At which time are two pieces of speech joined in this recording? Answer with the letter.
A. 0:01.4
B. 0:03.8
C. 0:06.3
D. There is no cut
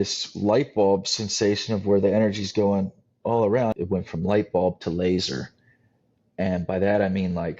B